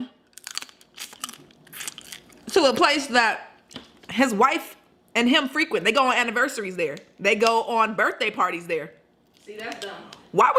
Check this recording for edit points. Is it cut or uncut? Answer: uncut